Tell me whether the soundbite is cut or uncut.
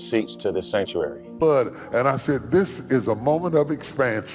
cut